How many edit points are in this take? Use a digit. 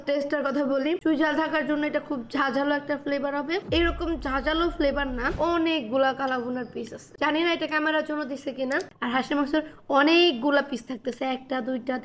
2